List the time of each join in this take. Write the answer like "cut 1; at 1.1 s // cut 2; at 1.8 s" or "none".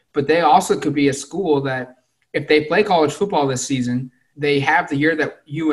cut 1; at 4.2 s